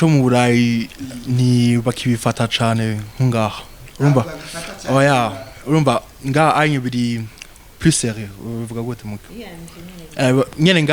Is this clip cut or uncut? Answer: uncut